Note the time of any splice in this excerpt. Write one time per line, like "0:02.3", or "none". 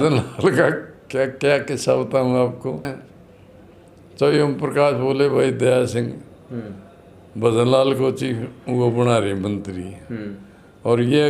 0:02.9